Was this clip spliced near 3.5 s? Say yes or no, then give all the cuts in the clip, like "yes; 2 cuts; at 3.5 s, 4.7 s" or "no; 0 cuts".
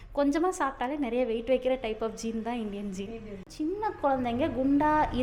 yes; 1 cut; at 3.5 s